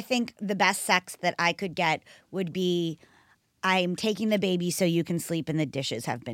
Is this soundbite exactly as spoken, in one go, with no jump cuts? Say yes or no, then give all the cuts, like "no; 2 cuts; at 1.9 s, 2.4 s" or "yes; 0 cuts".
yes; 0 cuts